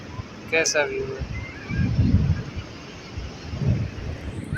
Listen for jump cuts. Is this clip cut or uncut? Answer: uncut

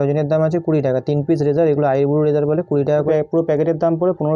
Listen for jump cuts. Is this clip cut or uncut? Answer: cut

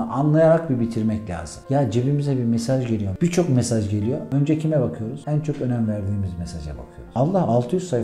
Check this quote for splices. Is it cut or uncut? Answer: uncut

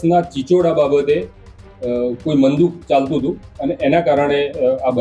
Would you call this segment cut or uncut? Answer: uncut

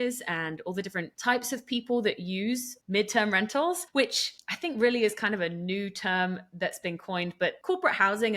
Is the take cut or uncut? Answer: cut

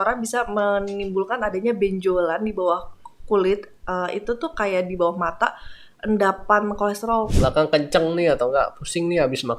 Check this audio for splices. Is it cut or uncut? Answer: cut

